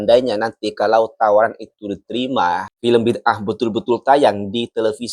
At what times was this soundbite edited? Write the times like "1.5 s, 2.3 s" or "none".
2.7 s